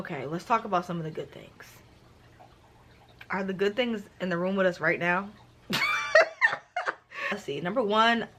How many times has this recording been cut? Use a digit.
0